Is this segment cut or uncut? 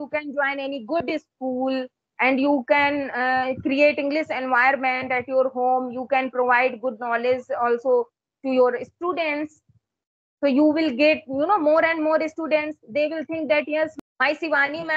cut